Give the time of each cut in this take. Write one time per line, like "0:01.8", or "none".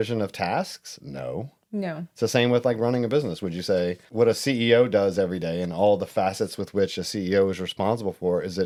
none